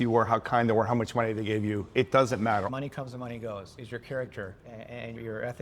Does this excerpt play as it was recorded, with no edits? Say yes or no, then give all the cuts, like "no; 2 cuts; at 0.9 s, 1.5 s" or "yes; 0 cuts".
no; 2 cuts; at 2.7 s, 4.7 s